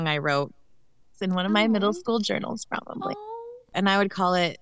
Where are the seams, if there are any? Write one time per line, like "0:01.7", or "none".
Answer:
0:03.7